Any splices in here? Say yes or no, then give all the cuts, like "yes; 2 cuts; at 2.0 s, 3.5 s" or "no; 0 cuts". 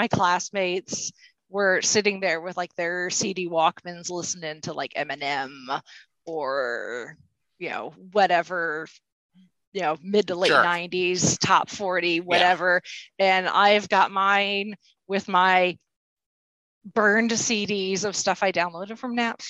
no; 0 cuts